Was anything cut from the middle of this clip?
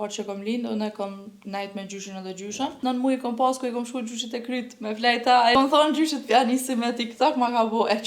yes; 2 cuts; at 2.8 s, 5.5 s

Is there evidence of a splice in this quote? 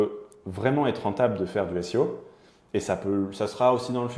no; 0 cuts

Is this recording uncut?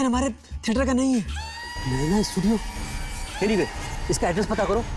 no; 1 cut; at 1.4 s

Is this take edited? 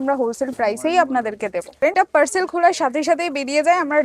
yes; 1 cut; at 1.7 s

